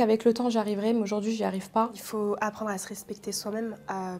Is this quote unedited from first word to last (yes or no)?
no